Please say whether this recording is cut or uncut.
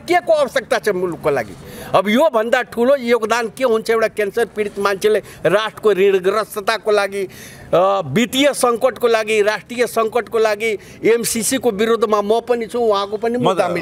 uncut